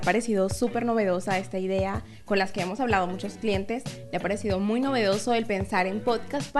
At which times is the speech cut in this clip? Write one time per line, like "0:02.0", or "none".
none